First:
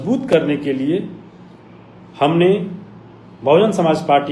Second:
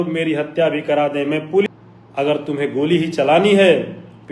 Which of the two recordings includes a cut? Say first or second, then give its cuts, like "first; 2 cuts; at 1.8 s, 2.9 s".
second; 1 cut; at 1.7 s